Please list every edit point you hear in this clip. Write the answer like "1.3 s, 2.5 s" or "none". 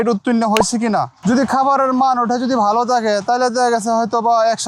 1.1 s